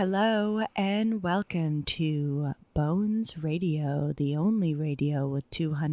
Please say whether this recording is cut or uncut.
uncut